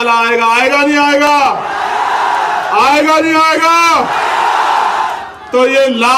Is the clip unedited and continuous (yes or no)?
yes